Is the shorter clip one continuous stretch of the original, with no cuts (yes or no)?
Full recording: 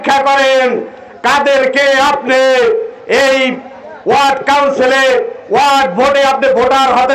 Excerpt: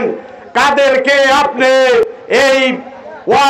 no